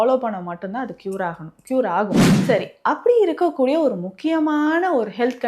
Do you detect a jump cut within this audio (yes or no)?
yes